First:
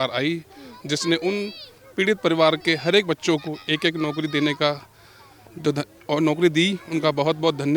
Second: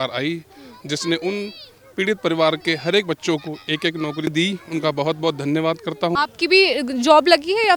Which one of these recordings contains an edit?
second; 2 cuts; at 4.3 s, 6.1 s

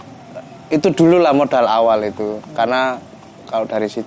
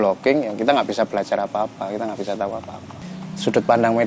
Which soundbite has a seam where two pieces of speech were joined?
second; 1 cut; at 3.0 s

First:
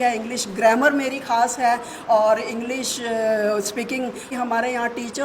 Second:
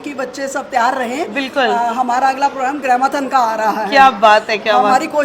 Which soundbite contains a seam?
first; 1 cut; at 4.3 s

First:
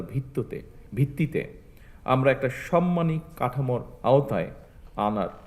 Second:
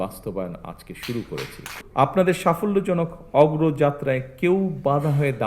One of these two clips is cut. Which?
second; 1 cut; at 1.7 s

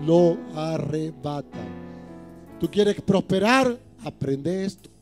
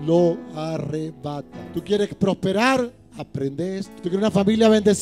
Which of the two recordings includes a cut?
second; 2 cuts; at 1.6 s, 3.9 s

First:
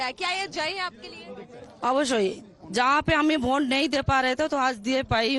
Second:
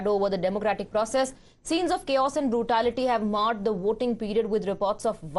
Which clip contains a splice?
second; 1 cut; at 1.2 s

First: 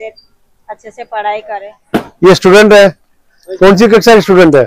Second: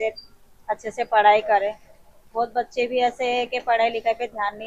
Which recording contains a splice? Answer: first; 1 cut; at 1.8 s

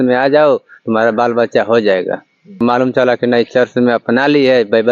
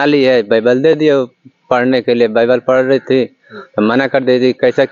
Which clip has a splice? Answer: first; 1 cut; at 2.6 s

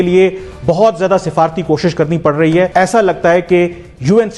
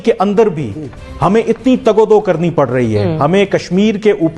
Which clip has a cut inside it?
first; 1 cut; at 2.7 s

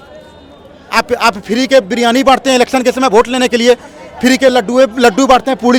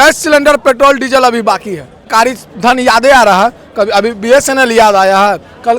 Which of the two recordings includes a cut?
second; 1 cut; at 2.1 s

